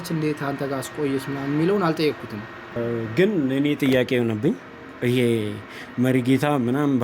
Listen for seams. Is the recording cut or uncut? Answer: cut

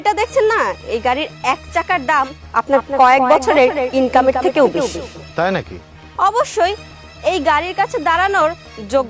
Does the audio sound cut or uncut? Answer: uncut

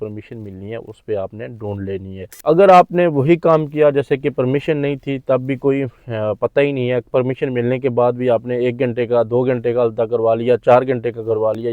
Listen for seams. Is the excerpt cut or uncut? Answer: cut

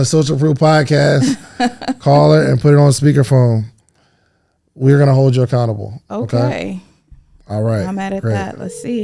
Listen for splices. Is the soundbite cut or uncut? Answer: uncut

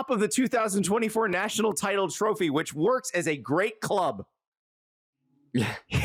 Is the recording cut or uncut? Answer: uncut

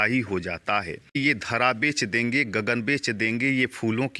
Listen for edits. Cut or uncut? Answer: cut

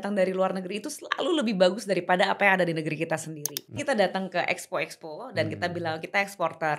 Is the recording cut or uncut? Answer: cut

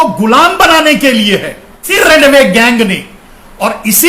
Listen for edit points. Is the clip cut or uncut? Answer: cut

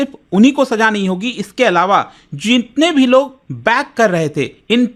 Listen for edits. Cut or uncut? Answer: uncut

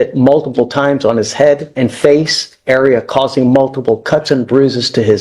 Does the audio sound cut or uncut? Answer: cut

